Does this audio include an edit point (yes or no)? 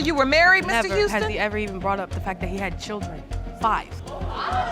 no